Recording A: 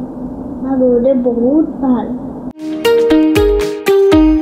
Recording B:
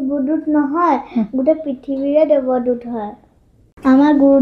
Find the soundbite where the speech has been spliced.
A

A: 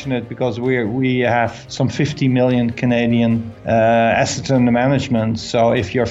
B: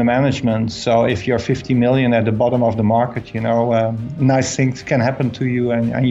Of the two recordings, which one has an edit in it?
A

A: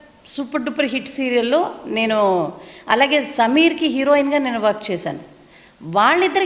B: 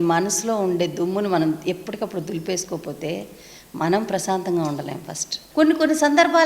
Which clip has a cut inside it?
B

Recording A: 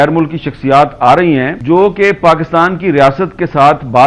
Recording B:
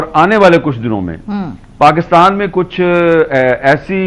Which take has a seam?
A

